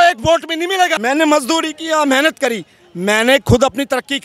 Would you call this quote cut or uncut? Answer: cut